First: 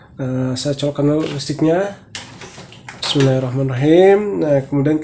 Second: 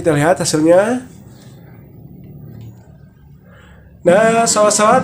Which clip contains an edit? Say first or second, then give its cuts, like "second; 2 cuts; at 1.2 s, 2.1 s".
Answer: second; 1 cut; at 2.7 s